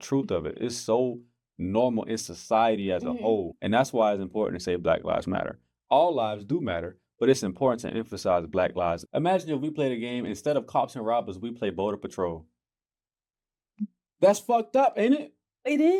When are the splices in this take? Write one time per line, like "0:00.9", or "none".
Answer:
0:03.5
0:09.0